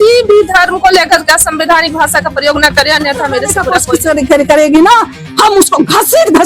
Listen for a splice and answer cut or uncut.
cut